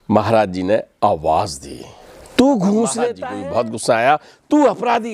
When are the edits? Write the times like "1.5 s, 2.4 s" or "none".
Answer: 3.2 s